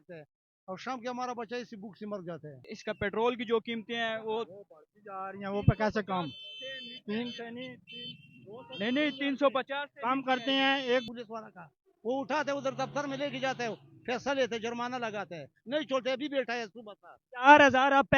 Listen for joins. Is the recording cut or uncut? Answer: cut